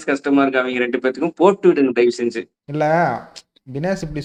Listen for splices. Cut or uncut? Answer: uncut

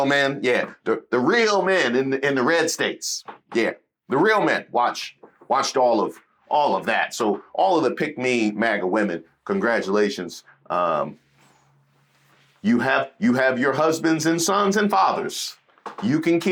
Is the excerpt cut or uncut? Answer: uncut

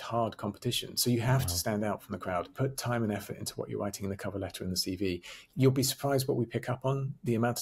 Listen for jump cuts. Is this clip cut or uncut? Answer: cut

